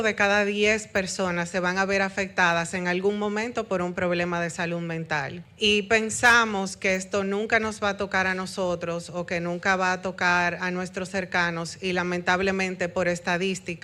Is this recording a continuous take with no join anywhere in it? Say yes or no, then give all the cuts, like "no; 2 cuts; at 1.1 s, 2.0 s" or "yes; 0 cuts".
no; 1 cut; at 5.4 s